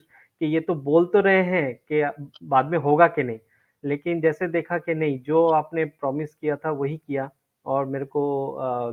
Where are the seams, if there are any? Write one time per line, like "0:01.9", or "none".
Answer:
none